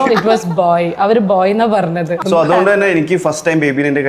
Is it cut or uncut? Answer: cut